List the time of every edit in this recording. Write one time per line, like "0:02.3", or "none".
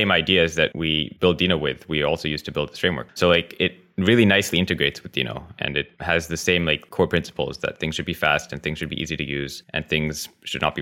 0:00.9
0:03.0
0:05.9
0:06.9
0:09.6